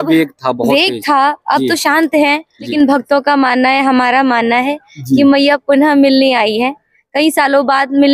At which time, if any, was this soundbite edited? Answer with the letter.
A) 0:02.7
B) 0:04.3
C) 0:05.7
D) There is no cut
A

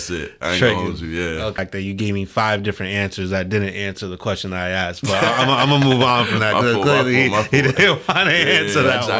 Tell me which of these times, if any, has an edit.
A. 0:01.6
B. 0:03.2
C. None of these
A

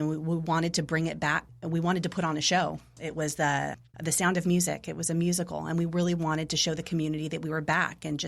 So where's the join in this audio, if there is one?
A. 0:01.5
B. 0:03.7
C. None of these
A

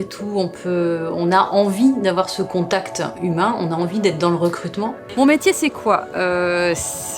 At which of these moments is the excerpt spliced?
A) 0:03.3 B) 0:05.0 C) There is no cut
B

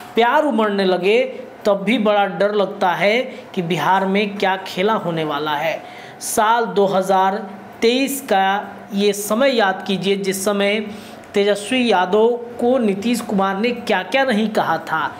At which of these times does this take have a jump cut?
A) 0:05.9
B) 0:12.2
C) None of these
C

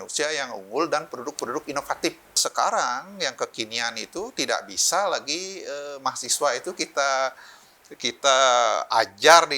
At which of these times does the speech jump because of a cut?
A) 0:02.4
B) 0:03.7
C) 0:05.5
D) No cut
A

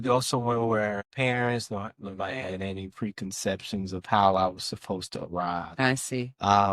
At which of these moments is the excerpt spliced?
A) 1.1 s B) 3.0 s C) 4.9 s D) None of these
A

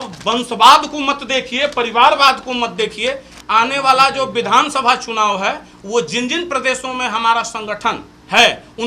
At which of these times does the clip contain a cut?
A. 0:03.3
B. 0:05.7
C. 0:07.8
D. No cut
A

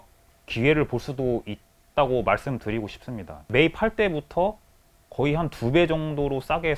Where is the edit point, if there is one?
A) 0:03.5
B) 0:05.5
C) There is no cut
A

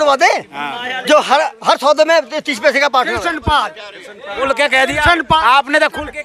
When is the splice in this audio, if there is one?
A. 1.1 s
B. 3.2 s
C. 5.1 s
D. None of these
B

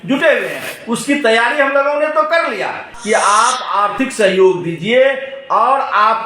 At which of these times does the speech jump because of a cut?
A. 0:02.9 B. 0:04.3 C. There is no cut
A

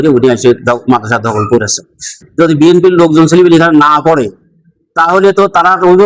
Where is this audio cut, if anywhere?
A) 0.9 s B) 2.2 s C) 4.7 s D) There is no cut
B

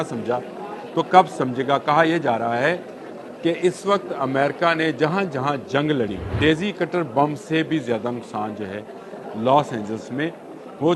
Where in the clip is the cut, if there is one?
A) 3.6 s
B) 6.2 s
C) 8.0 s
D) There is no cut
B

